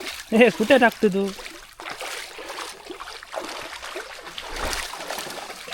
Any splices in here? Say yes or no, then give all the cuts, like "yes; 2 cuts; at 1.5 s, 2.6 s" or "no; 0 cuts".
no; 0 cuts